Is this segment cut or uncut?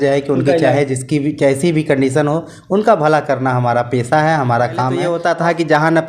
cut